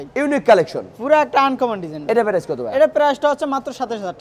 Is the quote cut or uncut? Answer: uncut